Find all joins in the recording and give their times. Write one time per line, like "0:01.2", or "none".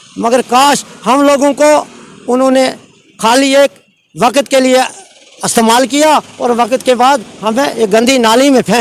none